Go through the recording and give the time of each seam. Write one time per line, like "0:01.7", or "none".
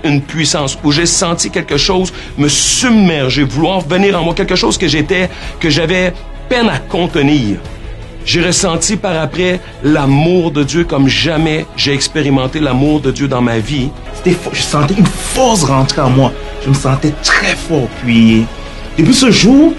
0:14.0